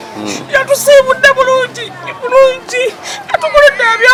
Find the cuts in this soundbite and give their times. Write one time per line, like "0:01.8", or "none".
none